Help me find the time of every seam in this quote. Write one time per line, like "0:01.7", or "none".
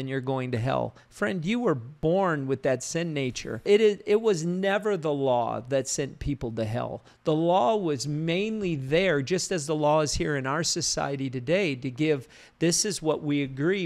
0:01.9
0:03.6